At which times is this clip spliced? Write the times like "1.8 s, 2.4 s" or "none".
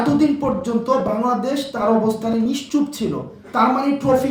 none